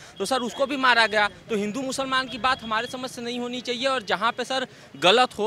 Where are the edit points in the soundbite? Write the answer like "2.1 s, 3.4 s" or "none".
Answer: none